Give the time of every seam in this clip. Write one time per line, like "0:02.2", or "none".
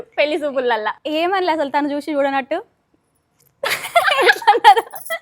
0:01.0

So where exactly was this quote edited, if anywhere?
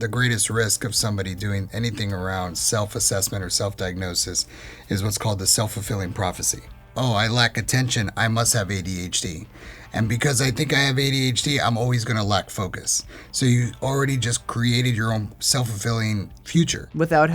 0:06.8
0:16.4

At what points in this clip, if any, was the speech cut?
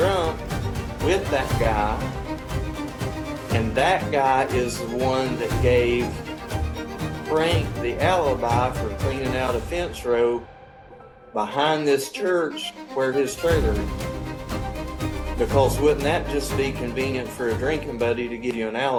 none

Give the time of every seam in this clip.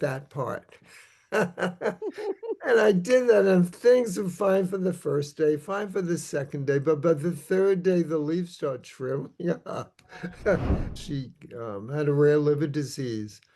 0:11.0

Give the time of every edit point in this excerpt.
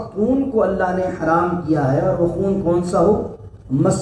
none

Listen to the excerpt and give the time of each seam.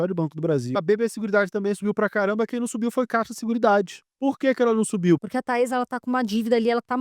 0:00.7
0:04.0
0:05.2

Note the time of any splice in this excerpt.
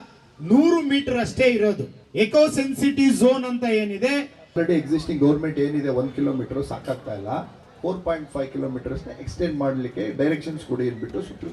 0:02.0
0:04.6

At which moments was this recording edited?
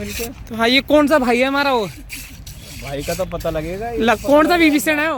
none

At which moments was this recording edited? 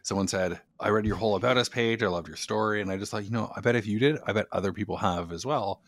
none

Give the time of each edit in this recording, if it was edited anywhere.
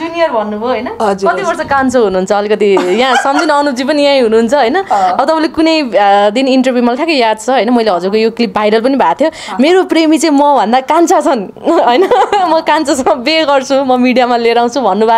none

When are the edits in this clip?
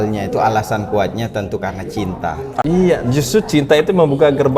0:02.6

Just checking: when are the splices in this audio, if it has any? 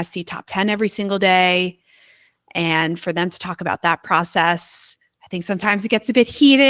none

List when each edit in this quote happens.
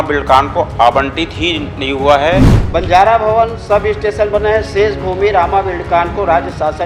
0:02.6

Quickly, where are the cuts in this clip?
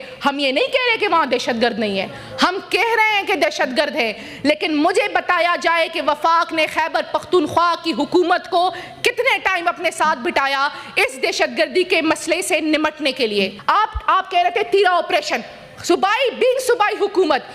0:13.6

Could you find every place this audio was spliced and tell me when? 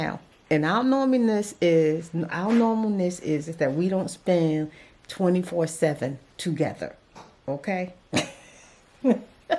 none

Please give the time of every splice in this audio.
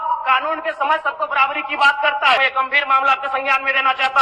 0:02.4

